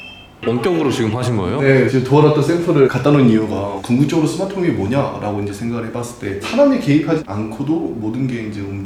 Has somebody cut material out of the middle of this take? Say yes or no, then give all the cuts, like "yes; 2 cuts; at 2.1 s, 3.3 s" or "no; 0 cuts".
no; 0 cuts